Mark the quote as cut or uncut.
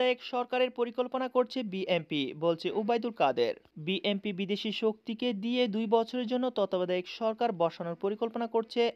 uncut